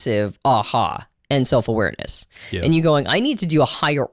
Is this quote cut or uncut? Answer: uncut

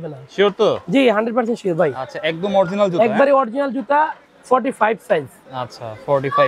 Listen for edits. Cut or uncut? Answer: uncut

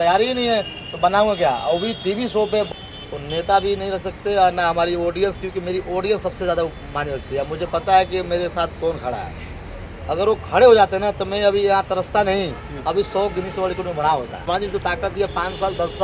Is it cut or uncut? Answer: cut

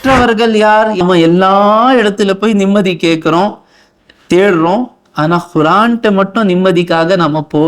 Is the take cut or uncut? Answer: cut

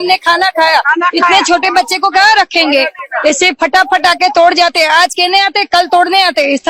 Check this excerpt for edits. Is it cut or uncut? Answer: uncut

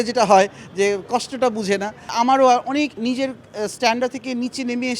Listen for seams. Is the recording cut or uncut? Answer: cut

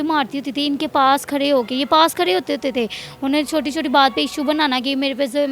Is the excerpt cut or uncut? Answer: uncut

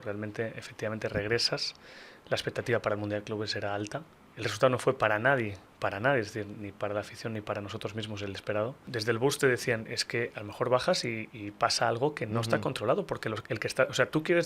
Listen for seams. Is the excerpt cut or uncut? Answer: cut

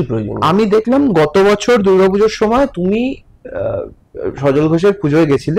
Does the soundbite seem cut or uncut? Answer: uncut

